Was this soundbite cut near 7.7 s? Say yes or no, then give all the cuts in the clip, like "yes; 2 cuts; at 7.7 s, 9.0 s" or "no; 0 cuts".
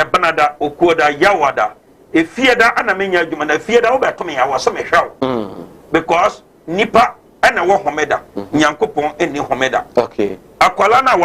yes; 1 cut; at 7.7 s